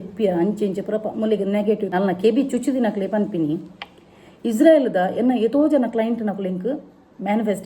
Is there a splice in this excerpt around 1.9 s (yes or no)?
yes